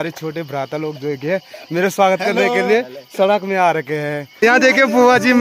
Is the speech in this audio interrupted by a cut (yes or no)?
yes